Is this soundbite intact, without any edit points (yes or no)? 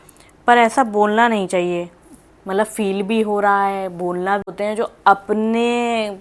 no